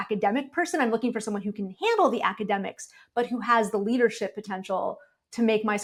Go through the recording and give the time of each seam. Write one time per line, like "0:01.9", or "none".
none